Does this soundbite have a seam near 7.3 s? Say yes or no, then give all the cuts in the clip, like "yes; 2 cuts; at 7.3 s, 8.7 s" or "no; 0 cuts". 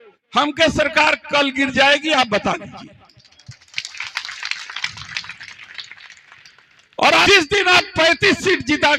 yes; 1 cut; at 7.3 s